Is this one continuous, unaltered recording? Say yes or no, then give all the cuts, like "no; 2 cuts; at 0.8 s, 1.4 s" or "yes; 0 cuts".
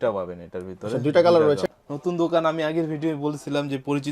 no; 1 cut; at 1.7 s